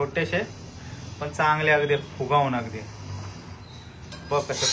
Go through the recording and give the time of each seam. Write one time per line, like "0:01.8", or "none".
none